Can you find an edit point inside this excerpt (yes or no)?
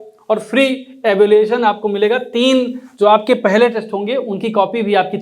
no